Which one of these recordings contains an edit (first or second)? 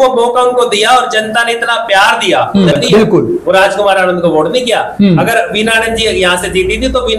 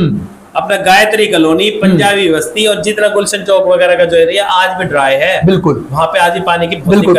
first